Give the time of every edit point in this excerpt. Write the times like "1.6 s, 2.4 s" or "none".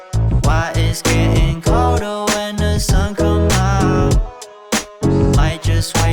none